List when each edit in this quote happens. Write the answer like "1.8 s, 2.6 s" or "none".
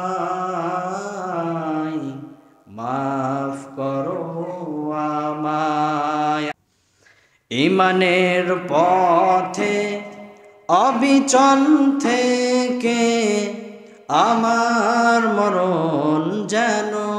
6.5 s